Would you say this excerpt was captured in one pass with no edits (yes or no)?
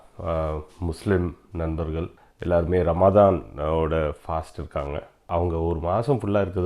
no